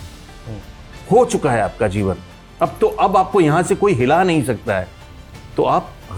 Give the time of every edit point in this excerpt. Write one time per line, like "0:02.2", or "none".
none